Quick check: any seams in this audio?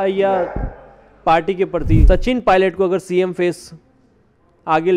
yes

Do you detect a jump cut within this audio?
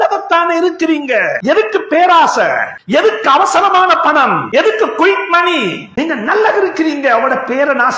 yes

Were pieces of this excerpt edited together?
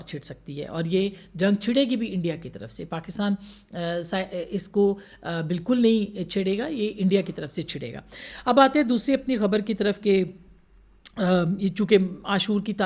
no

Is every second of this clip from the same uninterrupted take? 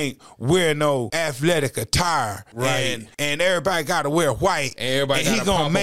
no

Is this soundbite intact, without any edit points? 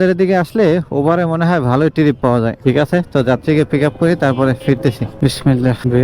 yes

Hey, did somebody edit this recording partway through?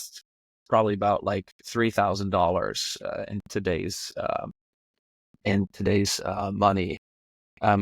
no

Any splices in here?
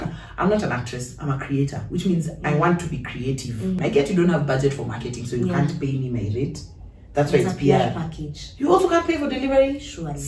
yes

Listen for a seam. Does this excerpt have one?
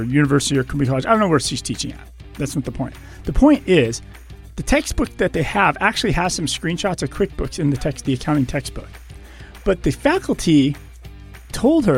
no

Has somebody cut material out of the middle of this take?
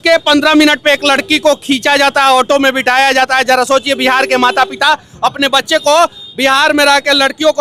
no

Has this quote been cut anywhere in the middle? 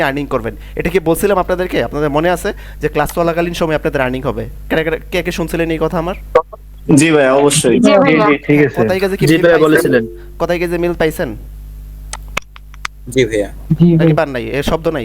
no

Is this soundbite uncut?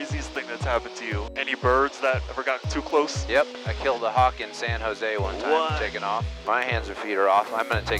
no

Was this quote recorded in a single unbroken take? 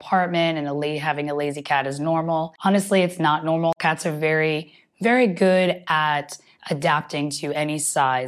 no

